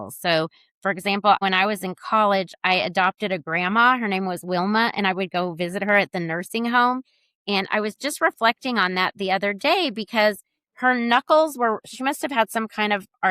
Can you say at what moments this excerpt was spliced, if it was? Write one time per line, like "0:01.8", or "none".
0:01.4